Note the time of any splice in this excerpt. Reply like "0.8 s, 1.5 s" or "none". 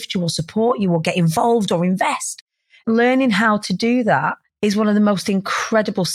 2.3 s, 4.5 s